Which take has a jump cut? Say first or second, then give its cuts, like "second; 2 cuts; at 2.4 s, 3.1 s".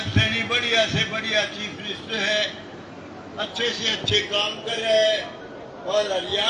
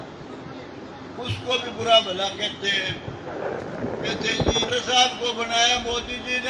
second; 1 cut; at 4.6 s